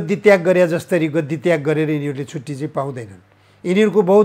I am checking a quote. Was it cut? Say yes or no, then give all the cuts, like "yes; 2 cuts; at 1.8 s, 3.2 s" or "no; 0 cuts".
no; 0 cuts